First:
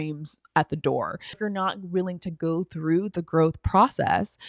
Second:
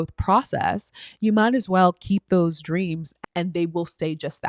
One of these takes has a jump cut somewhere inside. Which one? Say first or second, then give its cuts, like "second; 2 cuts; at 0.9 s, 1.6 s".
first; 1 cut; at 1.4 s